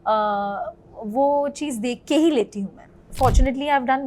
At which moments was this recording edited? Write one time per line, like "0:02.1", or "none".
0:03.1